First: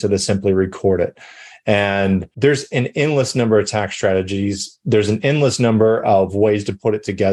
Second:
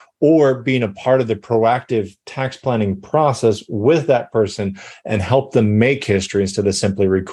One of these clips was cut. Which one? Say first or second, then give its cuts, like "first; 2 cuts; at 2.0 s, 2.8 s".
first; 1 cut; at 2.3 s